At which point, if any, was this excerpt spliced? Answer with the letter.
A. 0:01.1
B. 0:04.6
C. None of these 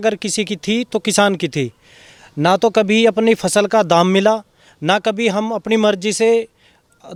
C